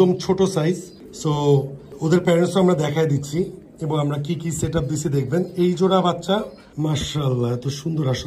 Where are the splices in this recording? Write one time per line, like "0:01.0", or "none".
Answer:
none